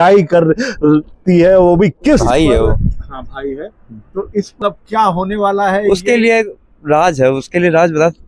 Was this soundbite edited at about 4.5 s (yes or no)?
yes